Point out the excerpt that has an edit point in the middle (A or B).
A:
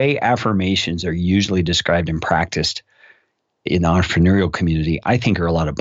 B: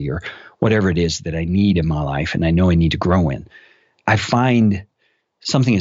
B